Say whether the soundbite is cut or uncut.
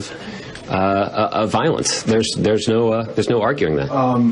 cut